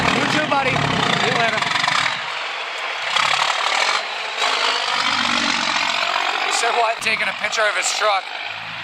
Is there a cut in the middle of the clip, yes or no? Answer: no